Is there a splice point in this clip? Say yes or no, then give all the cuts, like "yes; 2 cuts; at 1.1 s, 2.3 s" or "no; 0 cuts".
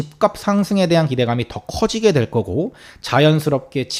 no; 0 cuts